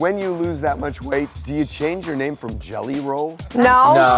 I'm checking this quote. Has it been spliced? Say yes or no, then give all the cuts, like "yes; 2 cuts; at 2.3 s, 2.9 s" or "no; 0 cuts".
yes; 1 cut; at 1.4 s